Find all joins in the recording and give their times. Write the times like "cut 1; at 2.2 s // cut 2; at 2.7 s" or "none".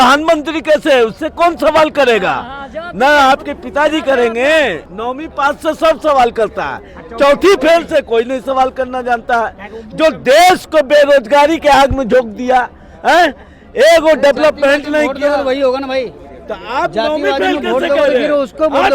cut 1; at 4.9 s